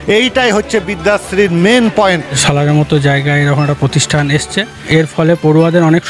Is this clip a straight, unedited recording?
no; 2 cuts; at 2.4 s, 4.9 s

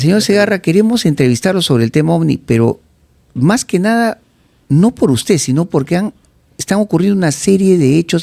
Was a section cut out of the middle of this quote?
no; 0 cuts

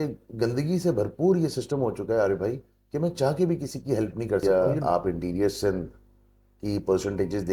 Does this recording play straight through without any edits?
no; 1 cut; at 4.4 s

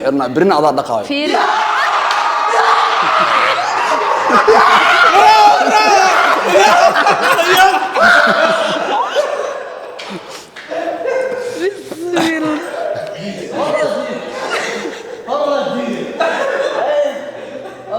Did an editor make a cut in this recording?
no; 0 cuts

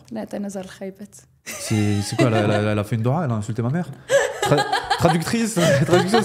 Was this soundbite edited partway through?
no; 0 cuts

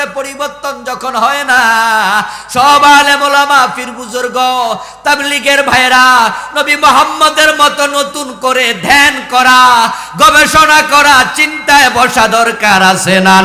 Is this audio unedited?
yes; 0 cuts

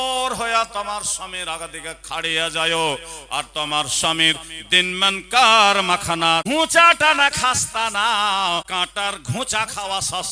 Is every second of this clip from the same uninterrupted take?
no; 2 cuts; at 6.4 s, 8.7 s

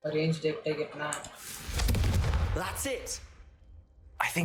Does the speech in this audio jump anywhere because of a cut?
no; 0 cuts

